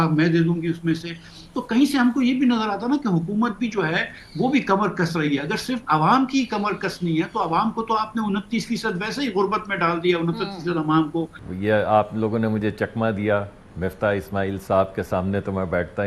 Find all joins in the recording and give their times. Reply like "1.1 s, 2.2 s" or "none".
11.4 s